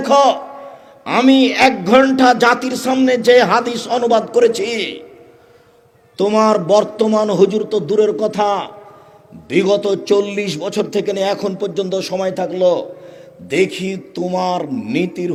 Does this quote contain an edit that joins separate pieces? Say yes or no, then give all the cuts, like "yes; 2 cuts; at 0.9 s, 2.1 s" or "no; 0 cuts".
no; 0 cuts